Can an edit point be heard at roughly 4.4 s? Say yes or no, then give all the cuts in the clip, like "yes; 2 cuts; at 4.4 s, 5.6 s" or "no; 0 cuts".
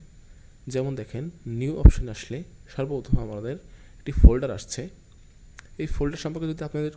no; 0 cuts